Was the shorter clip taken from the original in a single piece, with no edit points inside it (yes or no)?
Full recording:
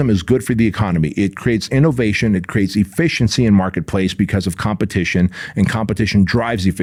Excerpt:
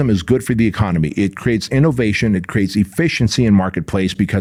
yes